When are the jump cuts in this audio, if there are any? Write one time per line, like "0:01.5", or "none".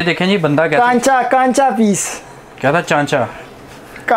none